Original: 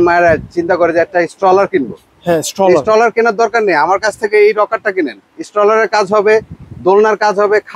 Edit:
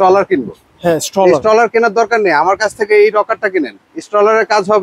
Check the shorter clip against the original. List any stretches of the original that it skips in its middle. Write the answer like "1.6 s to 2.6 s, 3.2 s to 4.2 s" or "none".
none